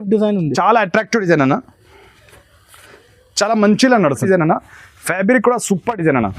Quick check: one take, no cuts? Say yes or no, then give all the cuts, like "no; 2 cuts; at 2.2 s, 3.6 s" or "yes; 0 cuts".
no; 1 cut; at 4.2 s